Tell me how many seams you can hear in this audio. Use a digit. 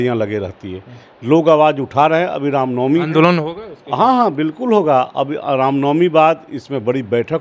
0